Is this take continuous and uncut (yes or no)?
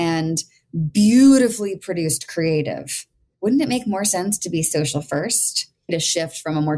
no